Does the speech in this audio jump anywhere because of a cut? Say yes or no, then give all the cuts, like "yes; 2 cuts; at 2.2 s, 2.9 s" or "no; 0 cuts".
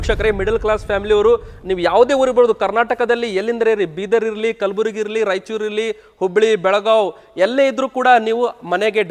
no; 0 cuts